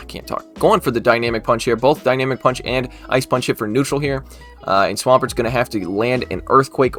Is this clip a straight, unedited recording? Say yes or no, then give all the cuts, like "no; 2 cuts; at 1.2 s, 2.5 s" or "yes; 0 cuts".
yes; 0 cuts